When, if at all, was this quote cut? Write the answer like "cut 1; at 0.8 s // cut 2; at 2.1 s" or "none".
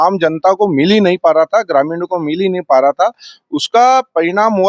none